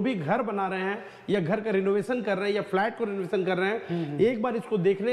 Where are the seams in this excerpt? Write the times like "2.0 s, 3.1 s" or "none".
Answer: none